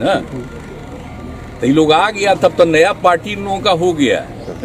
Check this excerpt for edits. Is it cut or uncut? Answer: uncut